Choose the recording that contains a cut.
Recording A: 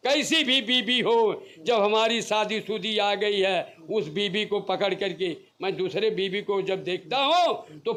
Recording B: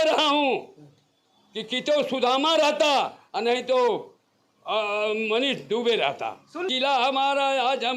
B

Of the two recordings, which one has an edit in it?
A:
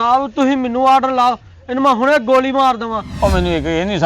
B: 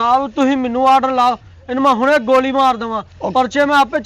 A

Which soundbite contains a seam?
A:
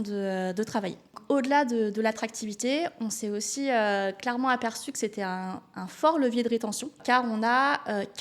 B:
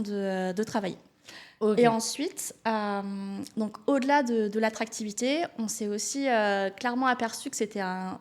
A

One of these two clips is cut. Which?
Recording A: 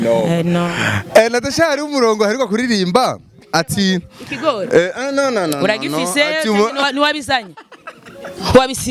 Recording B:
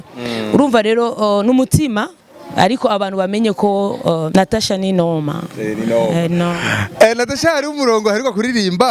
B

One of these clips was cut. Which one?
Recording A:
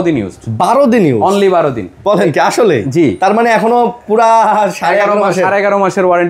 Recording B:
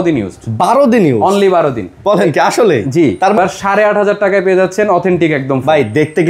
B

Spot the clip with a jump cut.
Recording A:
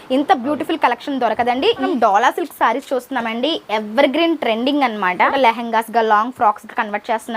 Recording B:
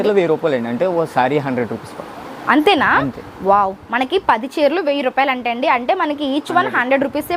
A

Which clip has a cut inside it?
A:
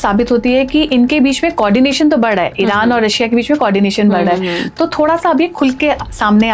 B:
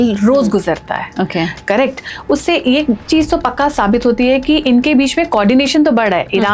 B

